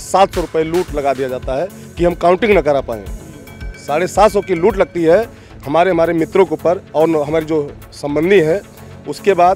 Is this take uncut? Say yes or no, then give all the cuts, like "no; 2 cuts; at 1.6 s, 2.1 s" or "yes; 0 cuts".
yes; 0 cuts